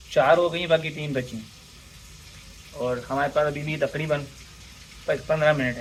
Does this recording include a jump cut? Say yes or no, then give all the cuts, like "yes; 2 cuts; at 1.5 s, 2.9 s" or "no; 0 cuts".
no; 0 cuts